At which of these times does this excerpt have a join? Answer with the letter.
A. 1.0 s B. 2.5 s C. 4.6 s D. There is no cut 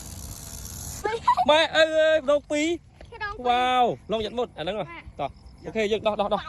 A